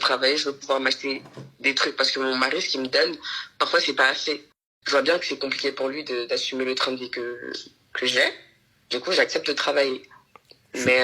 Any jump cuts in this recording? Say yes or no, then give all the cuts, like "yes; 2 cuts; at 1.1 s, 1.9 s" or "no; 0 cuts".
yes; 1 cut; at 4.7 s